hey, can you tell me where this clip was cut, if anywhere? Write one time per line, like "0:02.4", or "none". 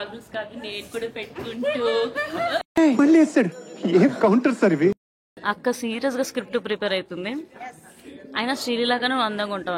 0:02.7
0:05.3